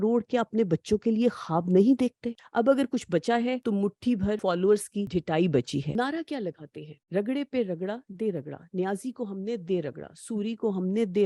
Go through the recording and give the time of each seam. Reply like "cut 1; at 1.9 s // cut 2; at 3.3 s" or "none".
cut 1; at 2.2 s // cut 2; at 4.2 s // cut 3; at 5.1 s // cut 4; at 5.9 s